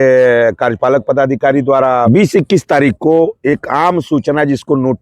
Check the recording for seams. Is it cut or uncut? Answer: cut